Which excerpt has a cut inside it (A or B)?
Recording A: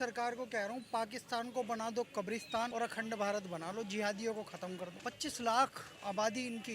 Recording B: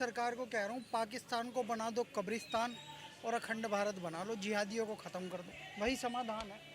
A